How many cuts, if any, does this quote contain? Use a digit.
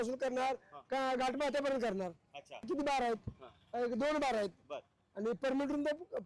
1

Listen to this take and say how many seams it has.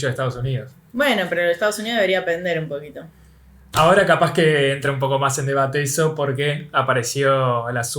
0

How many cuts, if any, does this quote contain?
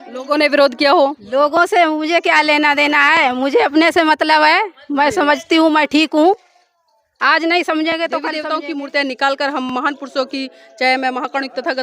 1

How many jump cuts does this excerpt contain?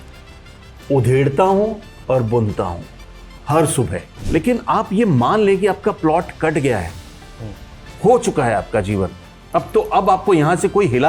1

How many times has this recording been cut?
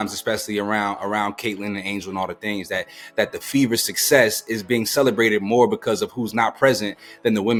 0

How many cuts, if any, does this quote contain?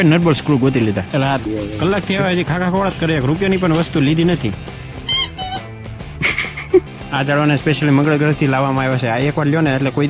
2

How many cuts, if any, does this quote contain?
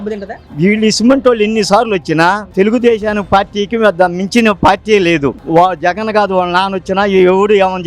1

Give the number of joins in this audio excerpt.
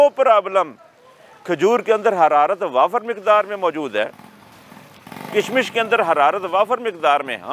0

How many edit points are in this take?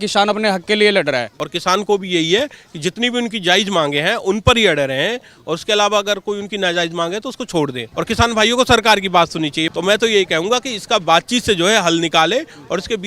3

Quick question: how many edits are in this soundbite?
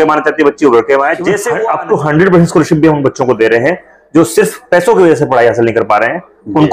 1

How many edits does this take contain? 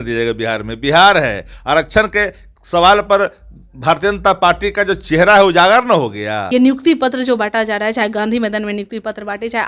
1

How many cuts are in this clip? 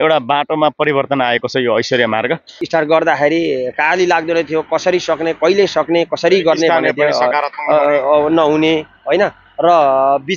1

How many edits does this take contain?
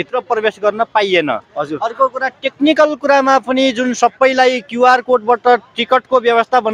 0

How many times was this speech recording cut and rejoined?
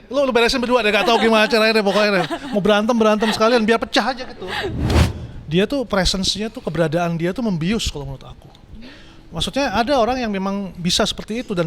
1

